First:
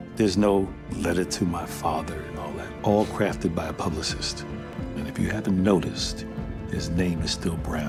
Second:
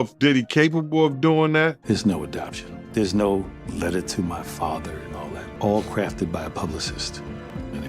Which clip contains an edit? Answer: second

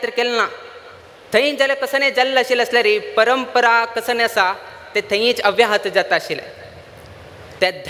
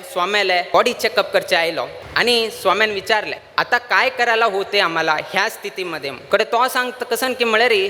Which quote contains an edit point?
second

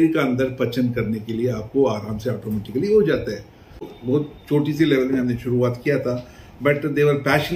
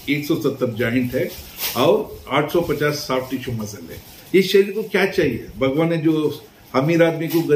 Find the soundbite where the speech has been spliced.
first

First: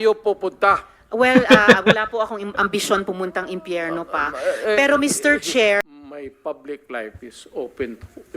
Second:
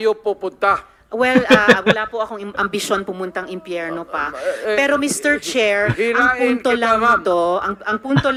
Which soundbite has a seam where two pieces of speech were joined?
first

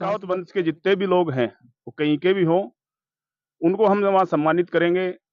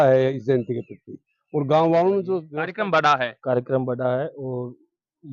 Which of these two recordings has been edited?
second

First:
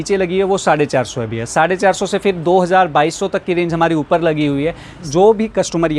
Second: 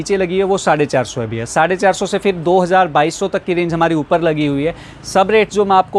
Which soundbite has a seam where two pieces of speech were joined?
first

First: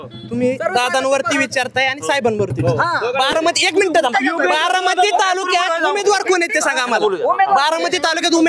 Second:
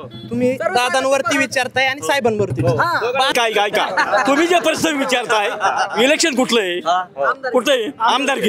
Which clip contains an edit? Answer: second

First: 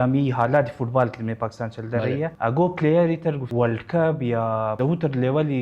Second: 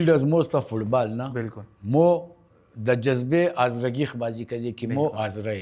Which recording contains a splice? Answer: first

